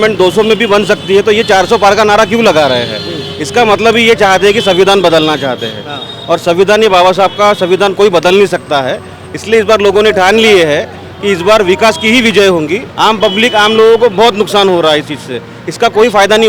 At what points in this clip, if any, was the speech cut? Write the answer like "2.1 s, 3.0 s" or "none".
12.8 s